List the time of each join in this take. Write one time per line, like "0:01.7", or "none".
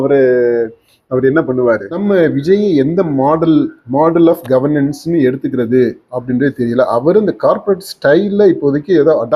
0:01.9